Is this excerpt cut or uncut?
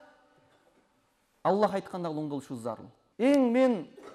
cut